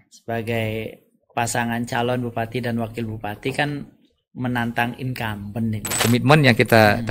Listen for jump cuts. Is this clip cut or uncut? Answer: cut